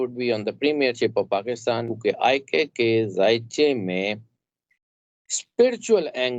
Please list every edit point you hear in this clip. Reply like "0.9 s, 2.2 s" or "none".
1.9 s